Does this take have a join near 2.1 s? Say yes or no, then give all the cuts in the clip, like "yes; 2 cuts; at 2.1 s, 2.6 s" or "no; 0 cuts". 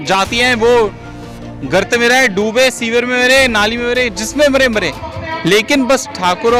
no; 0 cuts